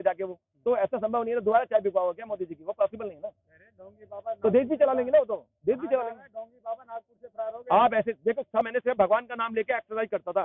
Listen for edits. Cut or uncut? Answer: cut